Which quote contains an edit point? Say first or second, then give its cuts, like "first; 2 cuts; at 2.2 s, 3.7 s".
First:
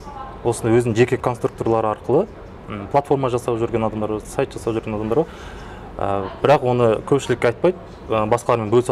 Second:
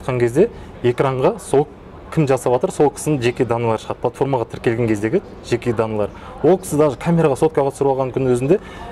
first; 1 cut; at 1.2 s